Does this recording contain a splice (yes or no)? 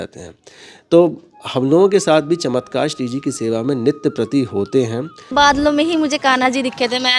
yes